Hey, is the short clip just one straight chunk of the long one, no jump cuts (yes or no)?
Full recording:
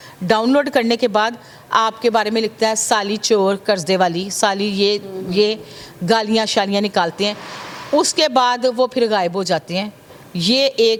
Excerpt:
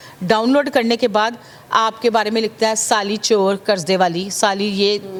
yes